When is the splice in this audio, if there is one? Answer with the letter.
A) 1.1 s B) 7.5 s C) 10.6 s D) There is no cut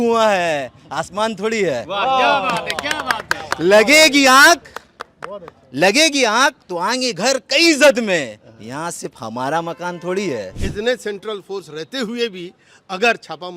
C